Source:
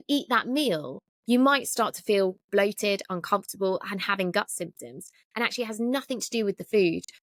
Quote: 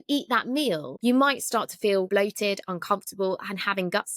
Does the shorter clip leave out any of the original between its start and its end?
yes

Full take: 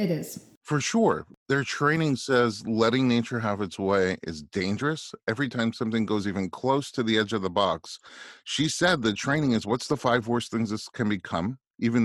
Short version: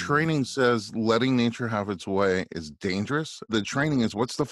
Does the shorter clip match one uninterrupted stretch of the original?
no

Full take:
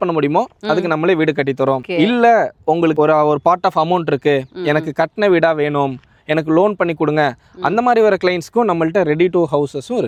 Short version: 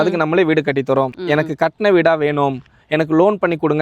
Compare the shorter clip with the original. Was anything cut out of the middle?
yes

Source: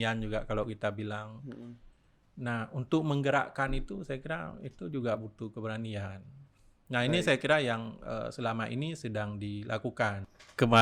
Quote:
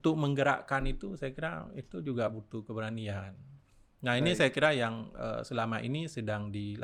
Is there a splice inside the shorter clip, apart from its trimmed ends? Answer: no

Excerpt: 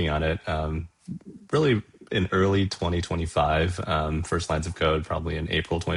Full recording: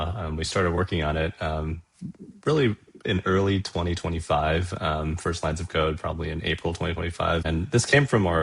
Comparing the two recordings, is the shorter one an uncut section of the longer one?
yes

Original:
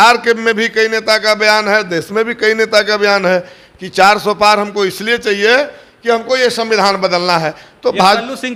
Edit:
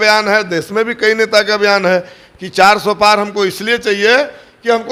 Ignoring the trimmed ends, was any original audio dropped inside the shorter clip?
no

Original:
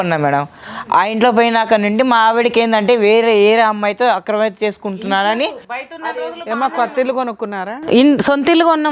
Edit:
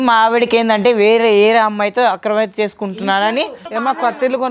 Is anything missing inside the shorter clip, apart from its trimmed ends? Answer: yes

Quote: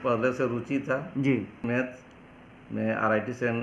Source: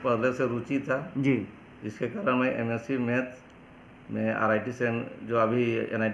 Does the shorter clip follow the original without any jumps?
no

